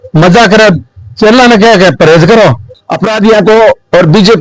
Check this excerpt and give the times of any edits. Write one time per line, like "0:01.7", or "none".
0:02.8